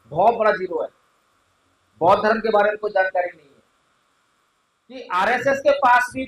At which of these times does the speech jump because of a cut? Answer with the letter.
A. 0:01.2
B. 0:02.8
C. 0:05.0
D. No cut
C